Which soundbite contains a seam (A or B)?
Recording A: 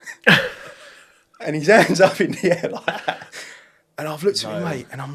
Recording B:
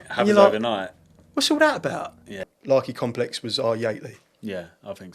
B